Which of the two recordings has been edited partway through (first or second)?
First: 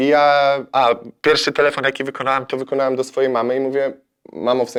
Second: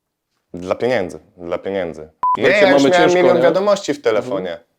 second